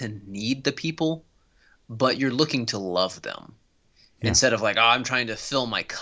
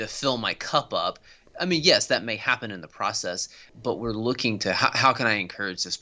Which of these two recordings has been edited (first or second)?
second